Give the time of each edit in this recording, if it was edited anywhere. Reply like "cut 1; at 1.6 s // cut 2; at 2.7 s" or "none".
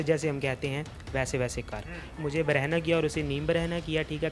cut 1; at 2.1 s